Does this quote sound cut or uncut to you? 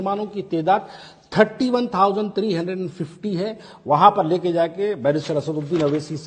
uncut